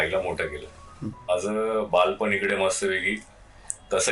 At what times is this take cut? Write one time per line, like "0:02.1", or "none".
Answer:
0:01.3